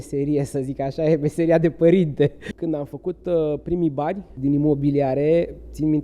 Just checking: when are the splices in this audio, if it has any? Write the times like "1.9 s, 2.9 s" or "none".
2.5 s, 4.3 s